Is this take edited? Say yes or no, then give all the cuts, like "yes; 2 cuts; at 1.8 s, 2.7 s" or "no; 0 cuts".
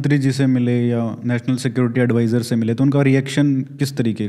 no; 0 cuts